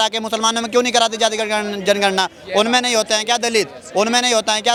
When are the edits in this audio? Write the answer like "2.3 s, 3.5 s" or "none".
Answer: none

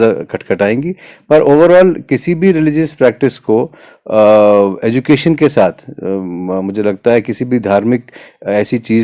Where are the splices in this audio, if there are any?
none

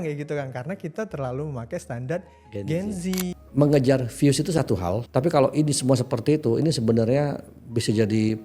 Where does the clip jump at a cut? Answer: 3.4 s, 5.0 s

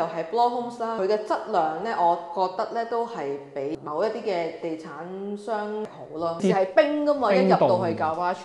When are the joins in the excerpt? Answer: 3.7 s, 6.4 s

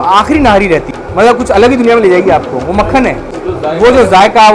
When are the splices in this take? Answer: 1.0 s, 3.3 s

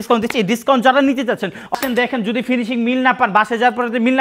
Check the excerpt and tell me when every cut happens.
1.7 s

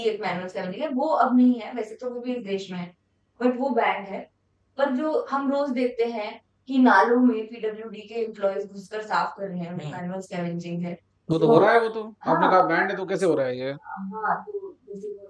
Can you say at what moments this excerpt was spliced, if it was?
none

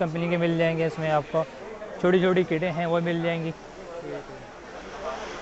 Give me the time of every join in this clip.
none

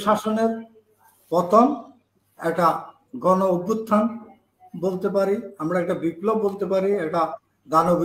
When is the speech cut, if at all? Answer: none

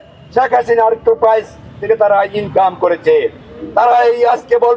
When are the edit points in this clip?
none

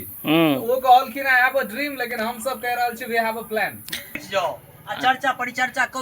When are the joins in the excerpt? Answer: 4.2 s

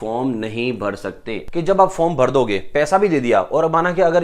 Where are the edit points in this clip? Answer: 1.4 s

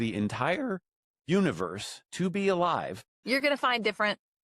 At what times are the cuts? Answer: 3.1 s

